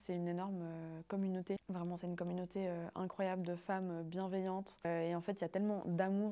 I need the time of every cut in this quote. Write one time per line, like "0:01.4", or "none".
0:01.6
0:04.9